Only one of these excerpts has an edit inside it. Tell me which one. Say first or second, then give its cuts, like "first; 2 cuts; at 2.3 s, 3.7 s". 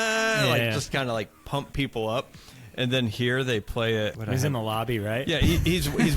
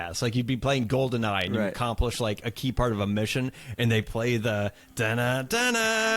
first; 1 cut; at 4.2 s